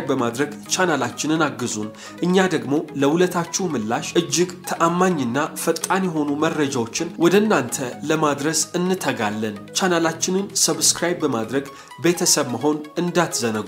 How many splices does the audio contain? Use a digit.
1